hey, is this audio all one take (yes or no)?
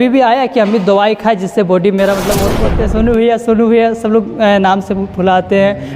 no